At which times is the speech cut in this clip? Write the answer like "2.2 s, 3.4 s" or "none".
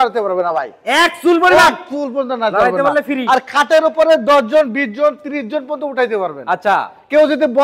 none